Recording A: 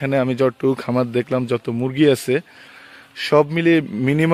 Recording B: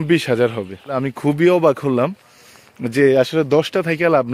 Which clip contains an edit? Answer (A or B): B